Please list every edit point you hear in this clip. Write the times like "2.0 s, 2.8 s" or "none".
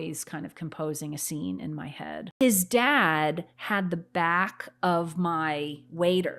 2.2 s